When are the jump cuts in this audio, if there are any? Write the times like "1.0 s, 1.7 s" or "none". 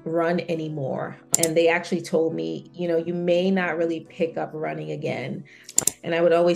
1.2 s, 5.7 s

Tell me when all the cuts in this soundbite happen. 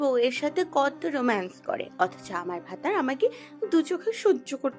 none

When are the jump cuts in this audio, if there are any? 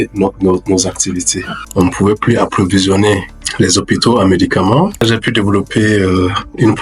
1.6 s, 5.0 s

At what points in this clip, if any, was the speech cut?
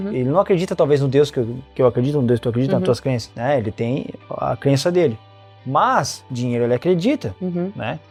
none

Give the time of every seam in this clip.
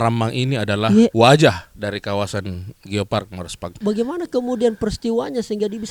1.1 s, 3.8 s

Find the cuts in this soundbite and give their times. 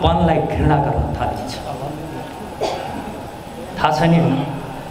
none

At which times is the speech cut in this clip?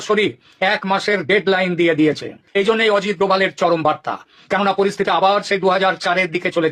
2.3 s

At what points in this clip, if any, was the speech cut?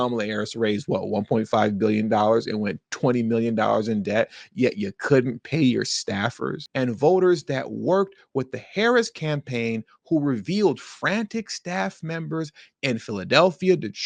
6.6 s

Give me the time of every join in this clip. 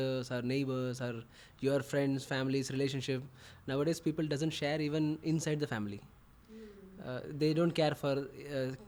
none

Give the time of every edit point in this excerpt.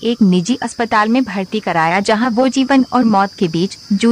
none

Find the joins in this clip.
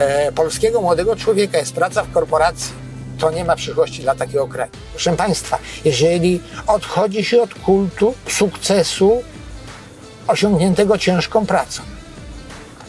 4.8 s

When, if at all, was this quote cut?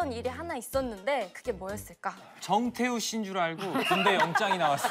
none

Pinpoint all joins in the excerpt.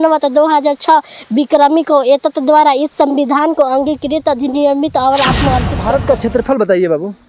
5.7 s

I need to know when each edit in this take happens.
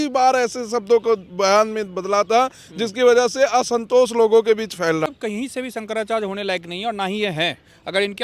5.1 s

